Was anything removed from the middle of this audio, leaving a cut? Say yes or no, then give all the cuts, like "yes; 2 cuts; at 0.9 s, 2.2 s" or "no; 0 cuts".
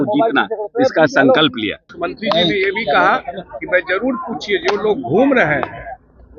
yes; 1 cut; at 1.9 s